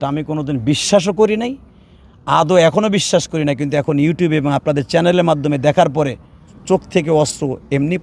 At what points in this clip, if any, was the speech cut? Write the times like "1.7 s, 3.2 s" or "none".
6.5 s